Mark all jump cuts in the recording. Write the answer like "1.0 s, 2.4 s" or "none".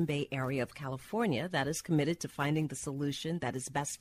none